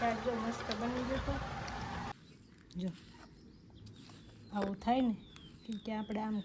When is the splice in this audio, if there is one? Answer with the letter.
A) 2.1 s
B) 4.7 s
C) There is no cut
A